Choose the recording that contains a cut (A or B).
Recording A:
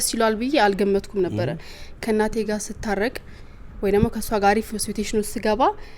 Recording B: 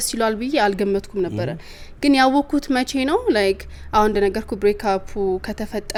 A